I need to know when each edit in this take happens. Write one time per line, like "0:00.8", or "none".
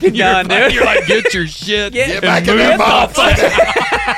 0:03.3